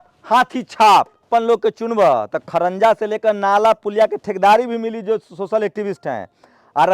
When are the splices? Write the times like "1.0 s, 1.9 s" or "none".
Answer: none